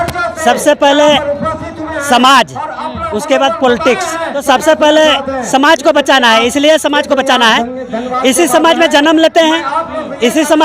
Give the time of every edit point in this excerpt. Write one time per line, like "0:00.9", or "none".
0:04.4